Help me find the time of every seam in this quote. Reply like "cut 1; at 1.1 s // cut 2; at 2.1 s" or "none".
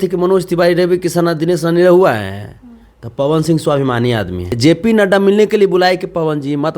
cut 1; at 4.5 s